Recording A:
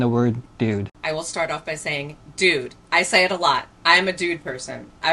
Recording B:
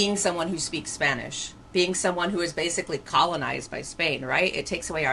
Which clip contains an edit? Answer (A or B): A